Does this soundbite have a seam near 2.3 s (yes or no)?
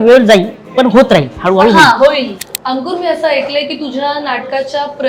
yes